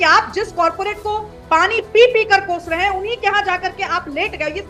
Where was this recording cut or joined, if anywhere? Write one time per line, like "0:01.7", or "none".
none